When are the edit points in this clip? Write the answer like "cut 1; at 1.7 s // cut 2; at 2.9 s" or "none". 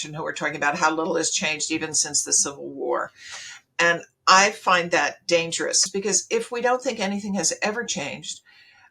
cut 1; at 5.8 s